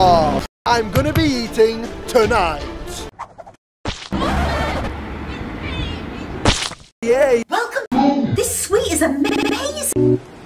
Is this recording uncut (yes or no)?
no